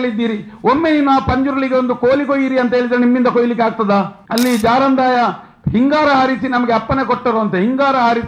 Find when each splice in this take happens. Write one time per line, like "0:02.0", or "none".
0:04.2